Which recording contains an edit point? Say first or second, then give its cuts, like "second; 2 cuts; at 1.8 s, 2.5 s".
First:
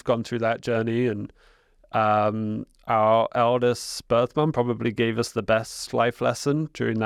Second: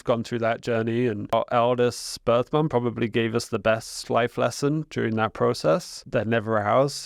second; 2 cuts; at 1.3 s, 6.0 s